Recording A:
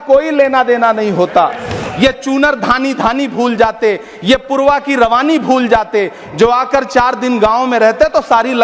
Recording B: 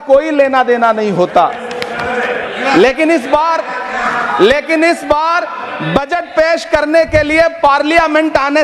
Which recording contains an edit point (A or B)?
A